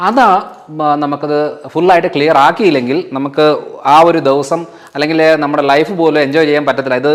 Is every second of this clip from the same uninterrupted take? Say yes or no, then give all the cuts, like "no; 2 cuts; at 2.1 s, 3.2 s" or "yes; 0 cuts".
yes; 0 cuts